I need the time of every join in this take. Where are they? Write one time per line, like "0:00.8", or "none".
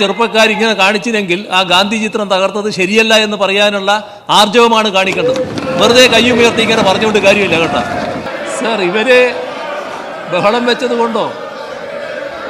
0:08.3